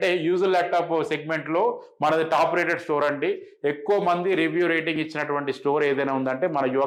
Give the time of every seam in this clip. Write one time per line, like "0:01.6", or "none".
none